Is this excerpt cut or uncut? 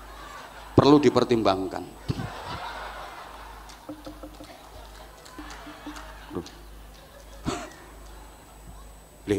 cut